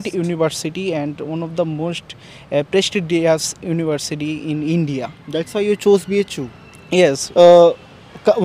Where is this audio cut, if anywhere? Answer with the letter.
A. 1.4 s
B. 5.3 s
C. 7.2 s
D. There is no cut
C